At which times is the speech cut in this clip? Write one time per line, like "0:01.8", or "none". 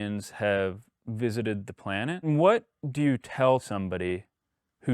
0:02.3
0:03.6